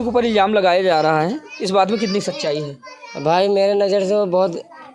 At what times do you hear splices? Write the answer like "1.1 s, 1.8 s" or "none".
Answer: none